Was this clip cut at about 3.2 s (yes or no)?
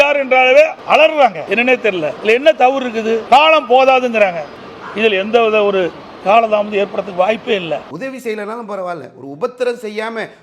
yes